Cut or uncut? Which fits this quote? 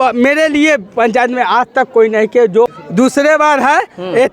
cut